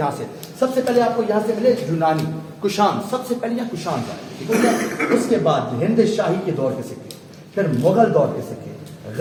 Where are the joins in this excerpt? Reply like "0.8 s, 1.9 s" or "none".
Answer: none